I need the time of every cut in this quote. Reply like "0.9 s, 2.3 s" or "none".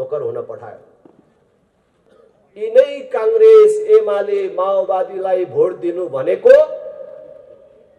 2.1 s